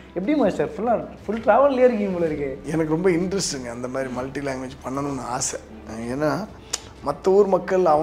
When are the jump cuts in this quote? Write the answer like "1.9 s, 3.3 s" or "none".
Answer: 2.6 s